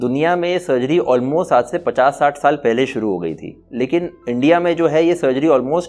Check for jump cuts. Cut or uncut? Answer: uncut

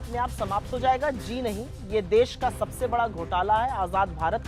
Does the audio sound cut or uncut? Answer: uncut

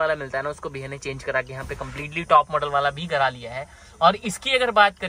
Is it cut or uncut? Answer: uncut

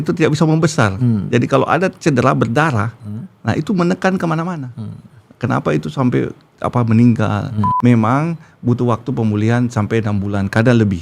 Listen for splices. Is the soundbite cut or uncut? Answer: cut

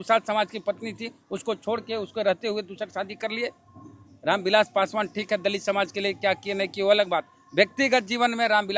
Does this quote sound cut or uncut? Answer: uncut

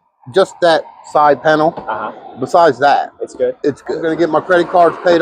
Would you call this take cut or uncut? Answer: cut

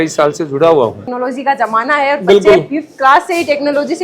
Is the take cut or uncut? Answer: cut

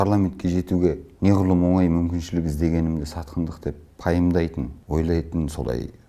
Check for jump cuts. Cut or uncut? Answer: cut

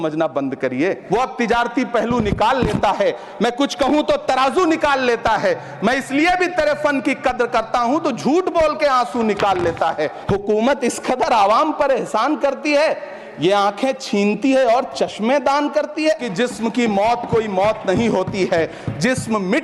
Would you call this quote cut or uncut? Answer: cut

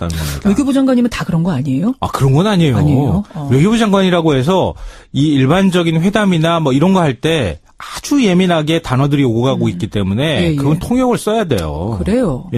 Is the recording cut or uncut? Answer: uncut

